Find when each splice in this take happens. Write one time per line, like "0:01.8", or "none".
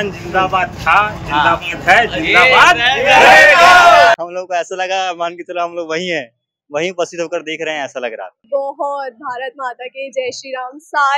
0:04.1
0:08.4